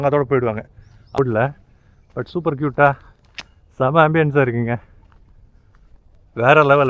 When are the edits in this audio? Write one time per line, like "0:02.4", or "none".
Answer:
0:01.1